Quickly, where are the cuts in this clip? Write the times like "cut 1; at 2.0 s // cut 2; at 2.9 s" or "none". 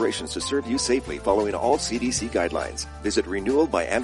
none